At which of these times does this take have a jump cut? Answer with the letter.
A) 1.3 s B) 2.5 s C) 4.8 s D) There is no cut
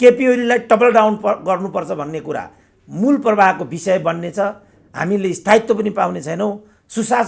D